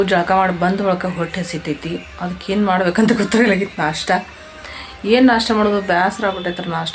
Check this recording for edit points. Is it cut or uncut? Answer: uncut